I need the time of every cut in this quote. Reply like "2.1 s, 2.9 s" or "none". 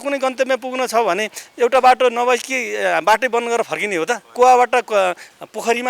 4.3 s